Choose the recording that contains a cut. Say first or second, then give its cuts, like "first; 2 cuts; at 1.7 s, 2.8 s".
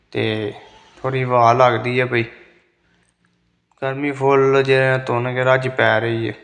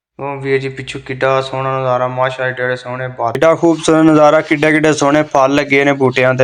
second; 1 cut; at 3.4 s